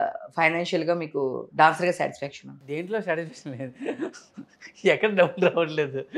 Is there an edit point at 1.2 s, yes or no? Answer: no